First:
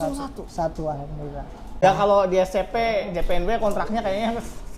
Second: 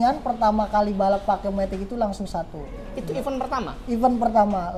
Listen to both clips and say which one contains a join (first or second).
first